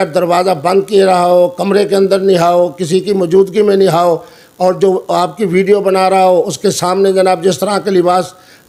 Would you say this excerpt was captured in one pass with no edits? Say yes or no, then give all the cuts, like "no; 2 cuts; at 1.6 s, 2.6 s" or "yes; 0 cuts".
yes; 0 cuts